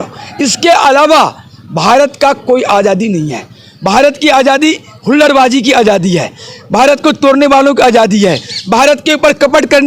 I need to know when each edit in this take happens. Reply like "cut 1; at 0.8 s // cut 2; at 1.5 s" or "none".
none